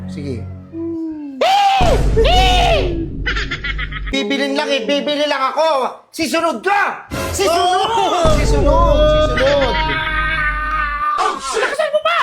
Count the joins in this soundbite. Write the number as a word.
one